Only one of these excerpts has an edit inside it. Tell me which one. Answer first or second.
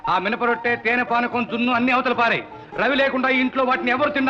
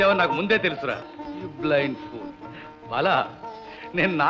second